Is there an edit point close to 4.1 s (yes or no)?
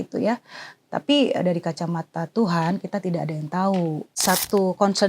yes